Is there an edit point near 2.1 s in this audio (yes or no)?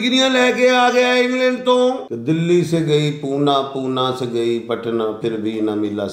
yes